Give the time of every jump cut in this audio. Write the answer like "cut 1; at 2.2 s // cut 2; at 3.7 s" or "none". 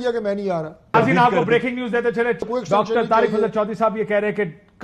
cut 1; at 0.9 s // cut 2; at 2.5 s

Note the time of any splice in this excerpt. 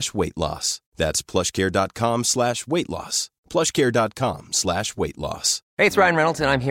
cut 1; at 5.6 s

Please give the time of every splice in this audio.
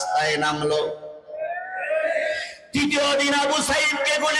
none

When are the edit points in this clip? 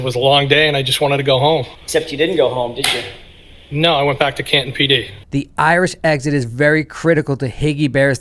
cut 1; at 1.8 s // cut 2; at 5.2 s

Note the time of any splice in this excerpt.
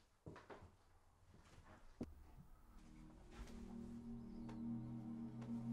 cut 1; at 2.0 s

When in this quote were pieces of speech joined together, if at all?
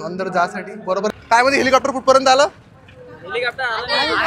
cut 1; at 1.1 s

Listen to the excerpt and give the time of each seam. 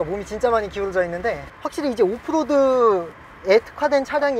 cut 1; at 1.5 s

